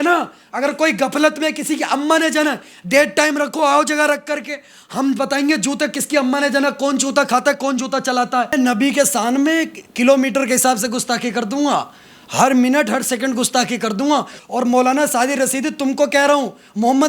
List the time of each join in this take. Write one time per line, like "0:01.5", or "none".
0:08.5
0:14.4

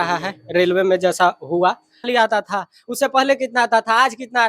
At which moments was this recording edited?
0:02.1

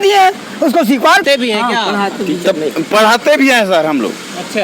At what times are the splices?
0:01.2

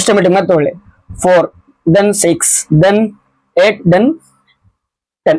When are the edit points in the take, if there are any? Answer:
none

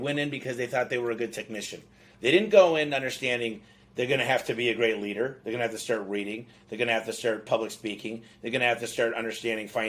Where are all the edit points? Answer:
none

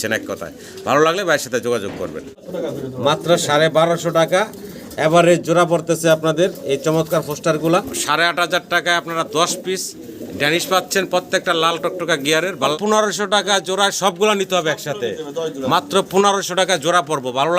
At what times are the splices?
0:02.5
0:08.0
0:12.7

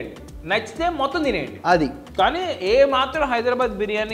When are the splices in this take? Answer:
none

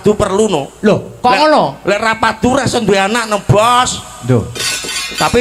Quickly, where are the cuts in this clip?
none

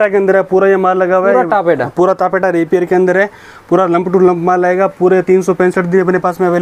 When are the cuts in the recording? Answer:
none

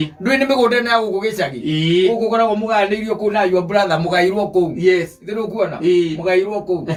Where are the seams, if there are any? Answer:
none

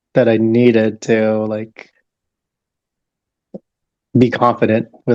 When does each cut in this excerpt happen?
none

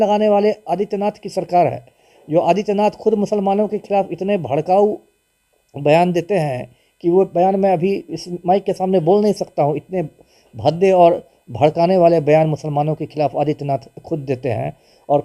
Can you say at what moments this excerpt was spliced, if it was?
none

